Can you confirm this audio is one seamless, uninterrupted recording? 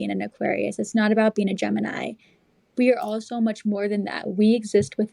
yes; 0 cuts

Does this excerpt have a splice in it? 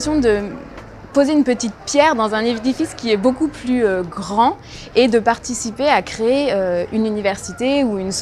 no; 0 cuts

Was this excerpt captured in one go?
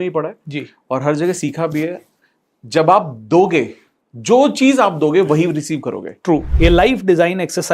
no; 1 cut; at 6.5 s

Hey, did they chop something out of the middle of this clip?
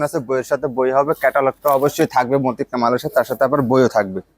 no; 0 cuts

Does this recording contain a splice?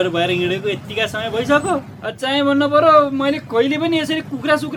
no; 0 cuts

